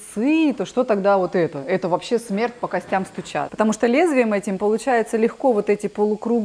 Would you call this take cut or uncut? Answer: cut